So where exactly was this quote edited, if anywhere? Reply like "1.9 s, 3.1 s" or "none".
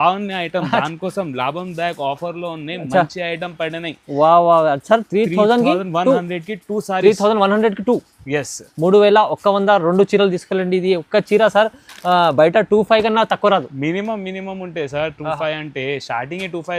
none